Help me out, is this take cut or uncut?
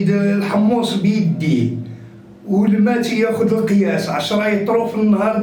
uncut